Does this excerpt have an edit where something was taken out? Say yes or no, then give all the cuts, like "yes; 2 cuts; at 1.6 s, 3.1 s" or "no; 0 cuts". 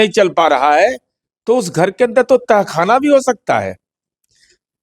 no; 0 cuts